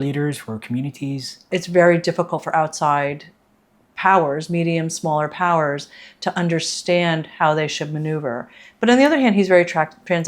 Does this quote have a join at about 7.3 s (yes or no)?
no